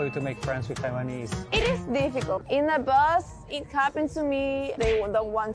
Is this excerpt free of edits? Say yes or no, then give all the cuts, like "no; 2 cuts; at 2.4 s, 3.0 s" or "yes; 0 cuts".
no; 3 cuts; at 1.4 s, 2.4 s, 4.7 s